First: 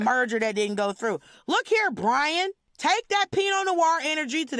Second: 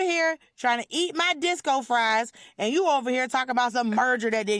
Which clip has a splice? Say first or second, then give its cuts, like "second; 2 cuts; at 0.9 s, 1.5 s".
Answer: first; 1 cut; at 2.6 s